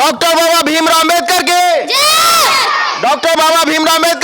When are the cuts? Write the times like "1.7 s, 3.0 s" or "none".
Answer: none